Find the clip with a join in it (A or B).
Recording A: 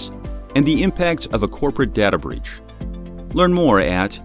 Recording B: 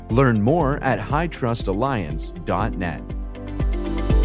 B